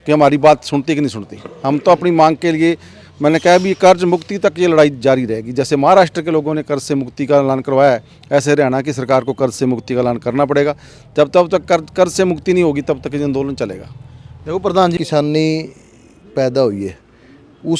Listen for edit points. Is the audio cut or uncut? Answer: cut